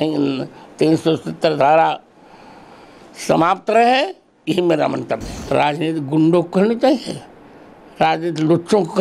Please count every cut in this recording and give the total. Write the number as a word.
one